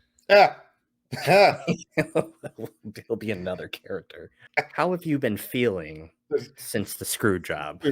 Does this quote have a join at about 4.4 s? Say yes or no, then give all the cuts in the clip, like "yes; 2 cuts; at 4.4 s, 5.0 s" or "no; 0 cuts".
yes; 1 cut; at 4.4 s